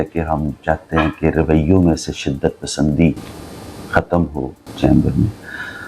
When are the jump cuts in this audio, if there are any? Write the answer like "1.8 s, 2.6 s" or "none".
none